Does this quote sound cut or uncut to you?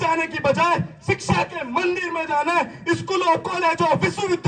uncut